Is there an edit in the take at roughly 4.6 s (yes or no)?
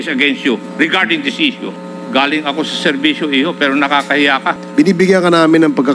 yes